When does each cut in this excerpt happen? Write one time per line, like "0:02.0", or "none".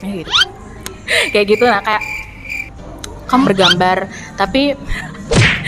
0:03.5